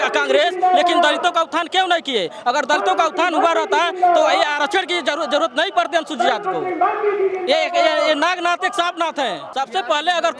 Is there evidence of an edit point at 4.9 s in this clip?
no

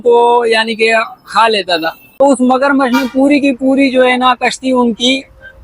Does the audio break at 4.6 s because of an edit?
no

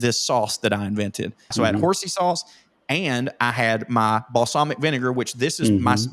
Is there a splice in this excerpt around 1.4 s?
yes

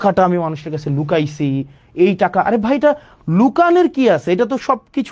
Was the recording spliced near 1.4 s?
no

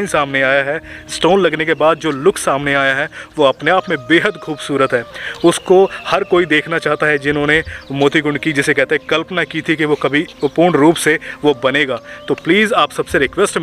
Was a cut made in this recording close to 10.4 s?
yes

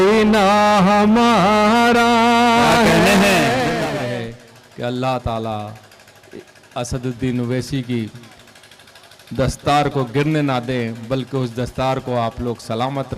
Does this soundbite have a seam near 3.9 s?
yes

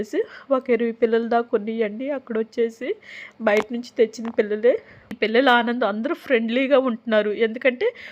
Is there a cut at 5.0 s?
yes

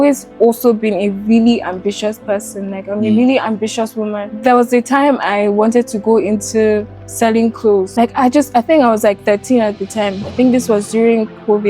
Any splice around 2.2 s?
no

